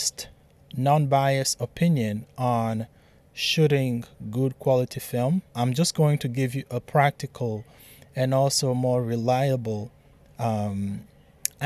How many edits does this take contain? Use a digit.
1